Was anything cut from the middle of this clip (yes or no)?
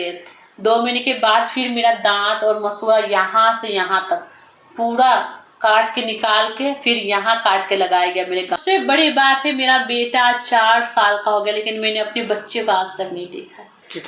yes